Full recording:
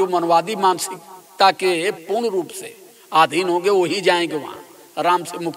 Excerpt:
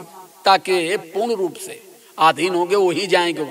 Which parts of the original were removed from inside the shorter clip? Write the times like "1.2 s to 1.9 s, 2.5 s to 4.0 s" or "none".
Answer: none